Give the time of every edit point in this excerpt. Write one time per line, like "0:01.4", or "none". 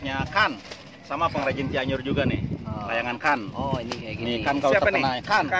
none